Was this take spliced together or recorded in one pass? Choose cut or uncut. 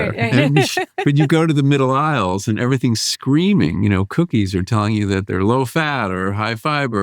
cut